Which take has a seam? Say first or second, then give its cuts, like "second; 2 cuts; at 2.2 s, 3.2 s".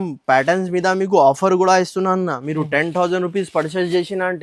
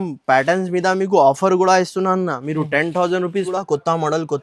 second; 1 cut; at 3.5 s